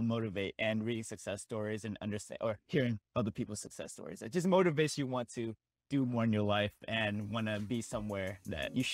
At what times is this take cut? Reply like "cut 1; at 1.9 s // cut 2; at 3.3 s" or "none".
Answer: none